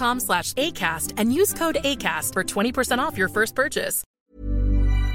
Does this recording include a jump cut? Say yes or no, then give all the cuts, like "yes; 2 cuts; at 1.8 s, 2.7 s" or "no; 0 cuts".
yes; 1 cut; at 4.0 s